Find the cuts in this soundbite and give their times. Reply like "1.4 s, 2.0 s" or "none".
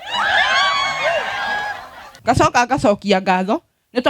2.1 s